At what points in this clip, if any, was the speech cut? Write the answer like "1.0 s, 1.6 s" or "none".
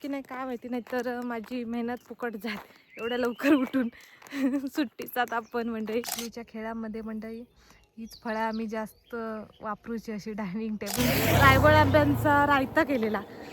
6.2 s, 11.0 s

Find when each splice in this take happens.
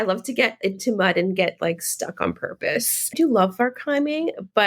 3.1 s

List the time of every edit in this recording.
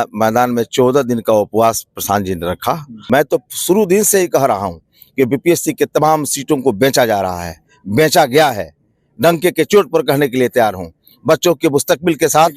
2.9 s

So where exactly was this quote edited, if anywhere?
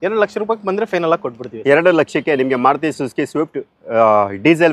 none

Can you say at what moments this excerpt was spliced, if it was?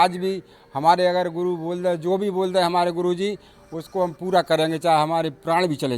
none

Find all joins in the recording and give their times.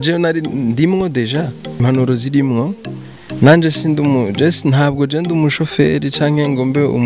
1.8 s

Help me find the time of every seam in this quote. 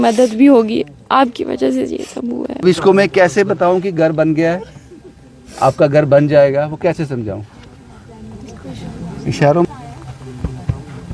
2.6 s, 9.6 s

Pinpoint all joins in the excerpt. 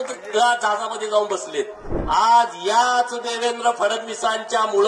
1.9 s

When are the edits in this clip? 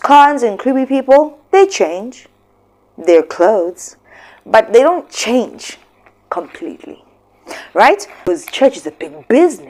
8.1 s

